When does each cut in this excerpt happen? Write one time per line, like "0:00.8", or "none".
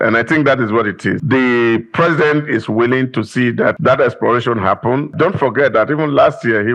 0:01.2
0:03.8
0:05.1